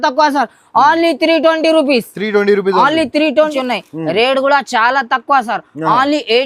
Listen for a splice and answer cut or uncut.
cut